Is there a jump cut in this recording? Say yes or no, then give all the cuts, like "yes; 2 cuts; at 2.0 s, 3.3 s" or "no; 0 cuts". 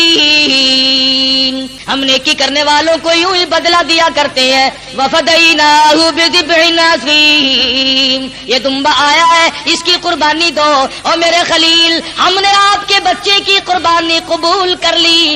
yes; 1 cut; at 1.8 s